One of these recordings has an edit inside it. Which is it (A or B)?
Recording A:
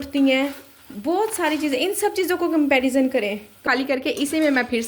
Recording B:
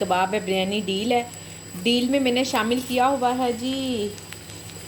A